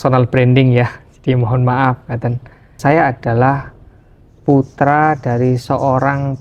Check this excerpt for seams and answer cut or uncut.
cut